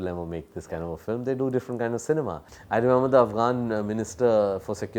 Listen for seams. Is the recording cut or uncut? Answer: cut